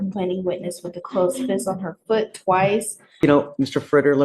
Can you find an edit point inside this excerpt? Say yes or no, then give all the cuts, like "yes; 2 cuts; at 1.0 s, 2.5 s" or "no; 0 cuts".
yes; 1 cut; at 3.2 s